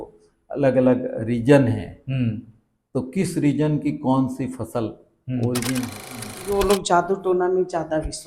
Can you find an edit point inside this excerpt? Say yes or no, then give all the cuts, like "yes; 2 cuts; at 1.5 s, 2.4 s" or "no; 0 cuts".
yes; 1 cut; at 6.3 s